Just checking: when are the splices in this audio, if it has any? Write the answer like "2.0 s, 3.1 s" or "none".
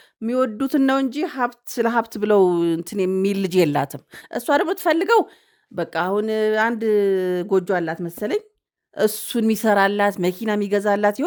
none